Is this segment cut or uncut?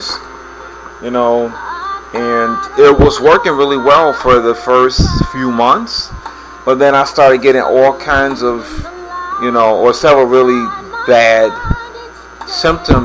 uncut